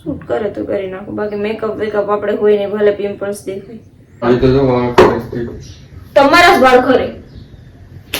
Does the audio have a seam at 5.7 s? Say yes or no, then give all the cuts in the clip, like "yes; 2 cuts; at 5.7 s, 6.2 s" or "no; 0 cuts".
no; 1 cut; at 4.2 s